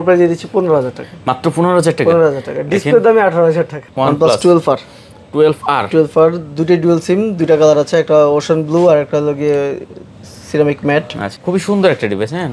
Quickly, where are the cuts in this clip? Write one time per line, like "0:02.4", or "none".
0:03.8
0:11.2

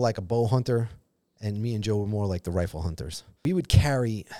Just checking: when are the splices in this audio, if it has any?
0:03.2

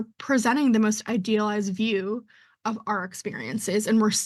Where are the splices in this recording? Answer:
none

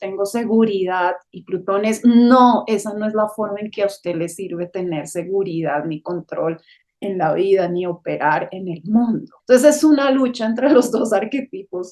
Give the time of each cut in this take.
0:09.3

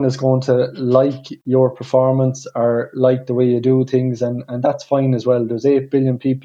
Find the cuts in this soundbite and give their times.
none

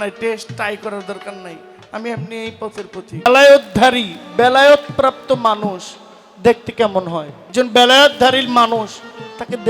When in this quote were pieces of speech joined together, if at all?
0:03.3
0:07.4

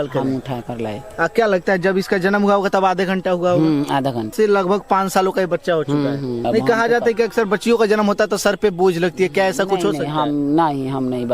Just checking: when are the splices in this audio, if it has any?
0:04.3
0:06.4

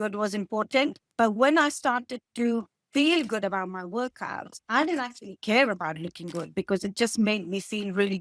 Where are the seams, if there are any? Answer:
0:01.0

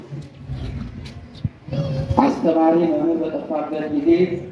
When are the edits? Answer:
none

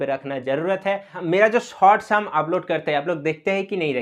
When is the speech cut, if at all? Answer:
0:01.1

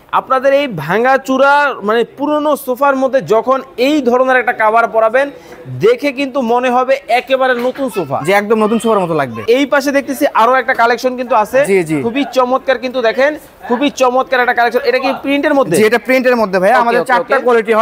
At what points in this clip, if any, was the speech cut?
0:09.4

